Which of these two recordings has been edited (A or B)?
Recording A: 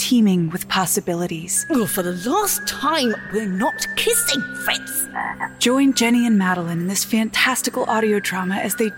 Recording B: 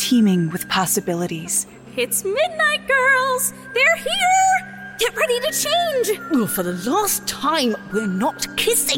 A